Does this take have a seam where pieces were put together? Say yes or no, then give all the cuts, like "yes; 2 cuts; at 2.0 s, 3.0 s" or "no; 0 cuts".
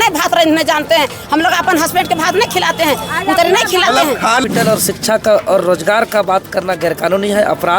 yes; 1 cut; at 4.4 s